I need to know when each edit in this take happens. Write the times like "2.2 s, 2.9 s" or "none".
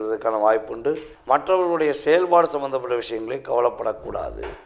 1.1 s